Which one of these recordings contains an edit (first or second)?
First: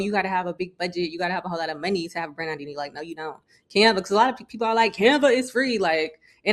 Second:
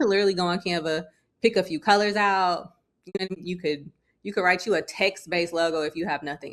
second